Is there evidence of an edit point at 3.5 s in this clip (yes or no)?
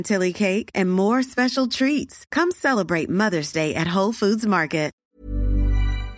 no